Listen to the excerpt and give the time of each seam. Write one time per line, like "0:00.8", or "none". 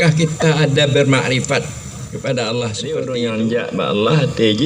0:02.9